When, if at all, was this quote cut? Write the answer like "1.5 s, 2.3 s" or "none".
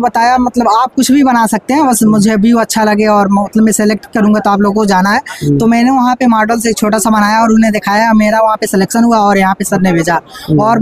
none